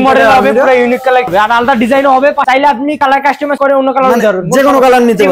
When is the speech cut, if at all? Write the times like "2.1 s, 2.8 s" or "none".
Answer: 1.3 s, 2.5 s